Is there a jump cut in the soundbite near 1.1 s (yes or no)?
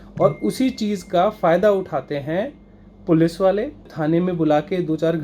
no